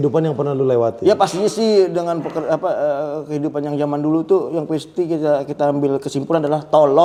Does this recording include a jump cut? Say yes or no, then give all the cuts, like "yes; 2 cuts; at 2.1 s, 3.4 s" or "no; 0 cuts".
no; 0 cuts